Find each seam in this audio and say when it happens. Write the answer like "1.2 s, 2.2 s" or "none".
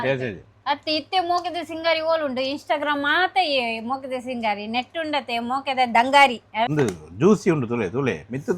6.7 s